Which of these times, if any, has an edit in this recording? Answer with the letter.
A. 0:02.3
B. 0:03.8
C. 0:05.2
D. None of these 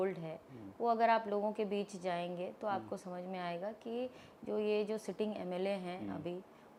D